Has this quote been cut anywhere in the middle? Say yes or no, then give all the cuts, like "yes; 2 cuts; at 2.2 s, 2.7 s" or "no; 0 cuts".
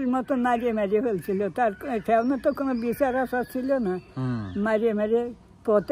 no; 0 cuts